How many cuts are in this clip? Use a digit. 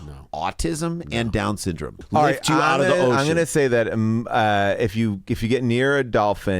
1